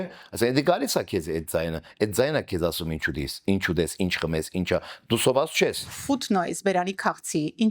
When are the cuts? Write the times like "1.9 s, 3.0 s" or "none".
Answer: 5.9 s